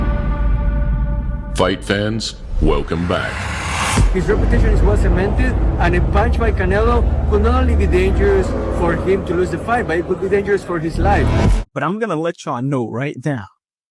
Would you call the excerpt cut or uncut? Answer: cut